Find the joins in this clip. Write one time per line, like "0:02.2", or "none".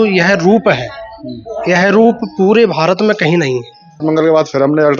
0:04.0